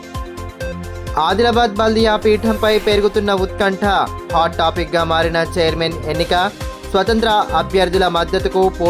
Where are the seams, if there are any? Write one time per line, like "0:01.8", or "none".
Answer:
0:00.9